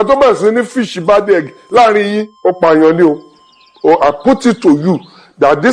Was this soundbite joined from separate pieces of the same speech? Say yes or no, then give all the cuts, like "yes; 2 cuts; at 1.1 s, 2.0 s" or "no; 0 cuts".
yes; 1 cut; at 2.3 s